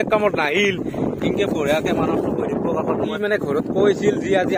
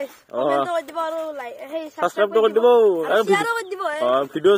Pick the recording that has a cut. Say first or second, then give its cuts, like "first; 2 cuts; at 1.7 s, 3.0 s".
first; 1 cut; at 3.1 s